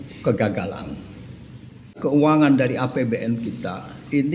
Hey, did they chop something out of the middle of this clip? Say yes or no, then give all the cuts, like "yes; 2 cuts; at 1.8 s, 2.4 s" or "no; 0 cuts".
yes; 1 cut; at 1.9 s